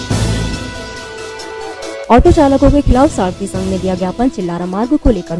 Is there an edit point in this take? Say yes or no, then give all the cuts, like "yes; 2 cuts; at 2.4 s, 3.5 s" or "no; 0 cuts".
no; 0 cuts